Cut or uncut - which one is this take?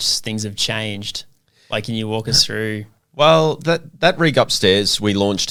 uncut